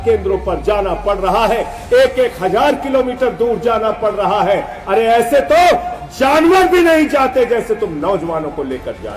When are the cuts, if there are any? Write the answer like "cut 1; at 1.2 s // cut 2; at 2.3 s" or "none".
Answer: none